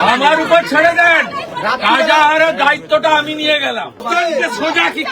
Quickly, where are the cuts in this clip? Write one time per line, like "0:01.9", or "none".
0:04.0